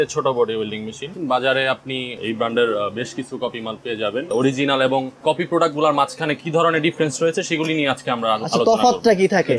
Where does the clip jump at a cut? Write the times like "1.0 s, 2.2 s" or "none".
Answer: 1.1 s, 4.3 s